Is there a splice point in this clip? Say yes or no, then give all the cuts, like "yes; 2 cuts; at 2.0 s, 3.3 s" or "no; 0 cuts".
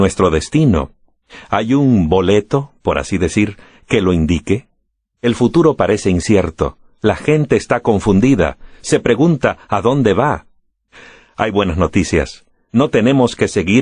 yes; 1 cut; at 11.3 s